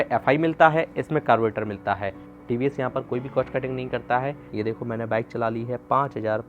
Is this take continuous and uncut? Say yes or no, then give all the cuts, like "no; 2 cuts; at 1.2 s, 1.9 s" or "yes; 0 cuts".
no; 2 cuts; at 2.3 s, 4.4 s